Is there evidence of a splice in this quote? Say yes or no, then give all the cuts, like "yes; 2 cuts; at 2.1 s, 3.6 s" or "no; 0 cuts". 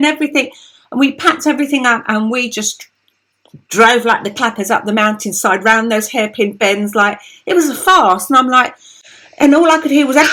no; 0 cuts